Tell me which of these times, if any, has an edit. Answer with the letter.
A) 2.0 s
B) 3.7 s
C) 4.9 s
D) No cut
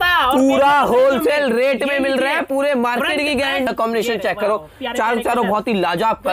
B